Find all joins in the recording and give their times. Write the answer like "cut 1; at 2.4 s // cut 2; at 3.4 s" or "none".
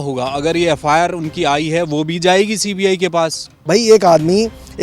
cut 1; at 3.6 s